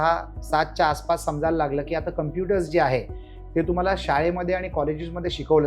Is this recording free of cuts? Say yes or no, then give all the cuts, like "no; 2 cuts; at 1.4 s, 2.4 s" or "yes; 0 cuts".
yes; 0 cuts